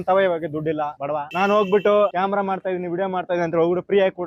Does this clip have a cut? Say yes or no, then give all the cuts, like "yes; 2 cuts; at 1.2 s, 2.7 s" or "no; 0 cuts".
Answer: no; 0 cuts